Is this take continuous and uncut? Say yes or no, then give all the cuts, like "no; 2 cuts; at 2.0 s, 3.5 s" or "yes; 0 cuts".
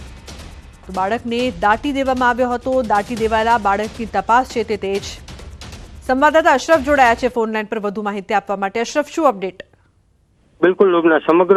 yes; 0 cuts